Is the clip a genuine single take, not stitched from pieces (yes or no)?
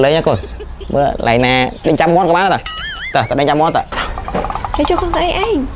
no